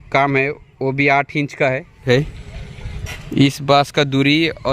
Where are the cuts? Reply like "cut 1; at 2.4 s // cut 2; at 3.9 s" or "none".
cut 1; at 2.1 s